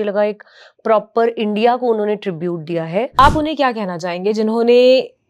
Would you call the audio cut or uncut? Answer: cut